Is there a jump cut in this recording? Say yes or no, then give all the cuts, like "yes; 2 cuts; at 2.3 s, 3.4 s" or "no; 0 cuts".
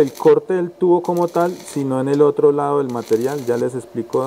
no; 0 cuts